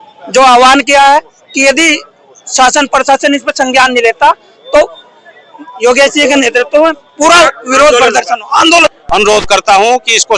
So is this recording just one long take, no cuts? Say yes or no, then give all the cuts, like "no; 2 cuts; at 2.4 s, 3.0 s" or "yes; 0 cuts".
no; 1 cut; at 9.0 s